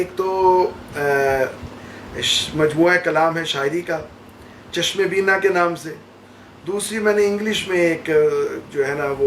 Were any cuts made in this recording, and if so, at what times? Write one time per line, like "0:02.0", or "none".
none

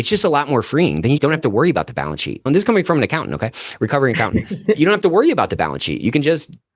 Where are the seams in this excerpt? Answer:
0:02.4
0:04.8

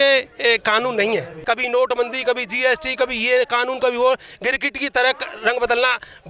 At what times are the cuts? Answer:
0:01.3

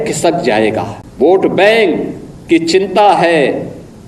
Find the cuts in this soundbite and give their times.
0:01.0

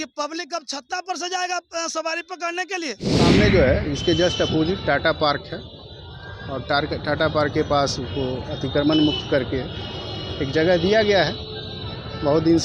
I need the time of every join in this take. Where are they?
0:03.3

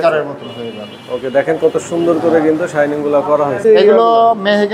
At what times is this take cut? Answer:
0:03.6

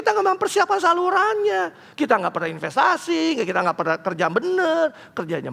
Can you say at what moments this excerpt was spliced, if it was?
none

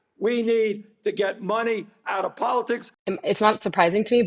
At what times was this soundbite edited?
0:02.9

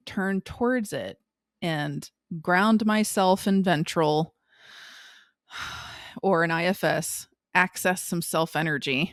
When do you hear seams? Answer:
none

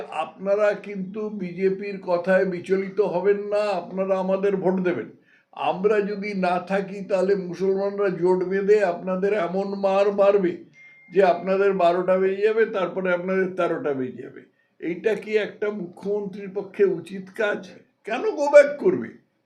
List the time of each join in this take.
0:17.7

